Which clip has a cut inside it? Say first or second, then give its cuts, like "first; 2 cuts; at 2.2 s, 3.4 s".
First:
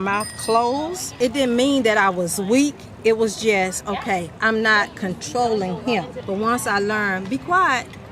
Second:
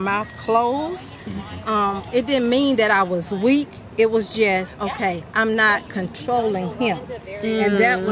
first; 2 cuts; at 1.1 s, 6.2 s